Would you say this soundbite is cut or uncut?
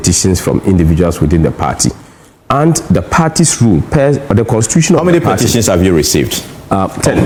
uncut